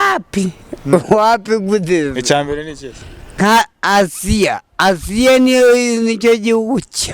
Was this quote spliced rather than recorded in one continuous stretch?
yes; 1 cut; at 3.4 s

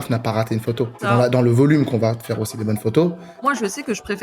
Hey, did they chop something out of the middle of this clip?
yes; 2 cuts; at 1.0 s, 3.5 s

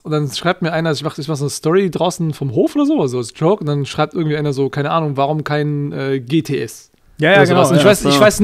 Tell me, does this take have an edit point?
no; 0 cuts

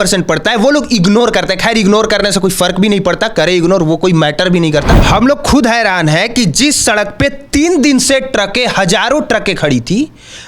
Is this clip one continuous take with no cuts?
no; 1 cut; at 5.0 s

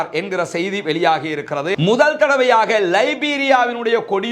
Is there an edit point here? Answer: yes; 1 cut; at 1.7 s

